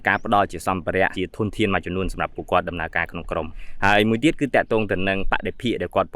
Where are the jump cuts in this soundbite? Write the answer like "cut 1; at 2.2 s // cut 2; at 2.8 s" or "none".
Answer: cut 1; at 1.1 s // cut 2; at 3.6 s